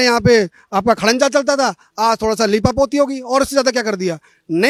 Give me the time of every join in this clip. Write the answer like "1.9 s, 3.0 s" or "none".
none